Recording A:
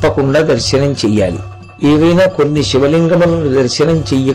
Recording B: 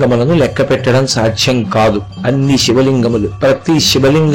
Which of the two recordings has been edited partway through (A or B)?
B